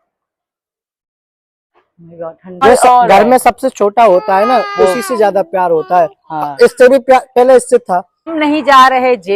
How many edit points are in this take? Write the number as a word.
two